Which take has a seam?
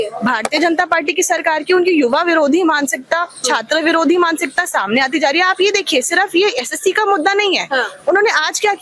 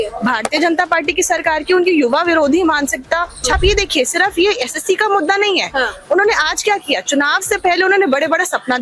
second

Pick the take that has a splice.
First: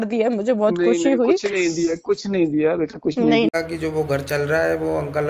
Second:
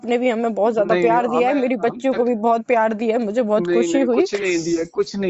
first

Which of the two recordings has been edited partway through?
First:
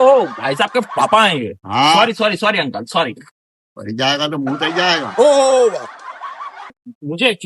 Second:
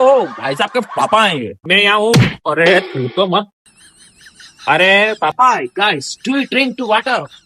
second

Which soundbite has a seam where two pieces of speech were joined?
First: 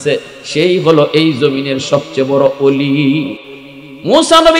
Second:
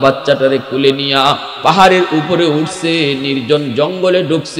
first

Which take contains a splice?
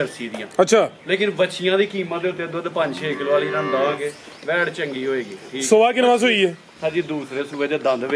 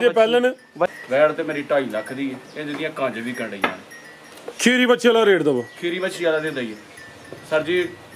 second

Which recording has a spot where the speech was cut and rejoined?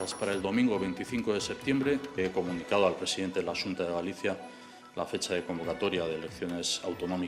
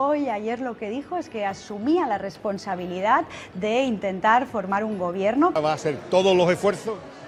first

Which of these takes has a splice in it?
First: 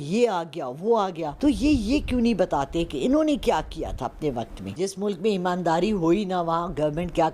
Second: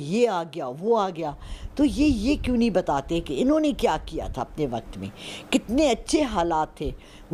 first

